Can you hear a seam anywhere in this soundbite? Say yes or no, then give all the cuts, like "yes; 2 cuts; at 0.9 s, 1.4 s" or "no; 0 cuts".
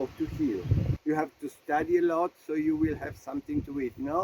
yes; 1 cut; at 0.9 s